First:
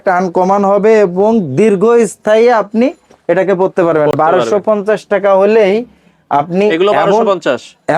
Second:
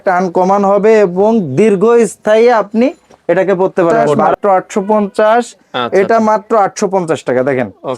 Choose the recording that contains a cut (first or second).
second